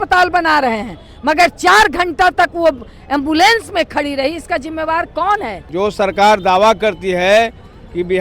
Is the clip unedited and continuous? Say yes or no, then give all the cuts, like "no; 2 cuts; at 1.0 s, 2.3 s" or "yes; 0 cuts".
no; 1 cut; at 5.6 s